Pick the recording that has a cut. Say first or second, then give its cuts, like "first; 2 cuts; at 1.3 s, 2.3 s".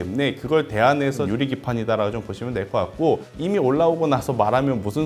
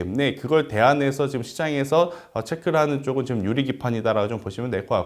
first; 2 cuts; at 1.2 s, 3.3 s